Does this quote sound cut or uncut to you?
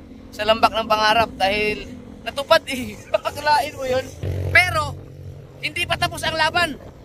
uncut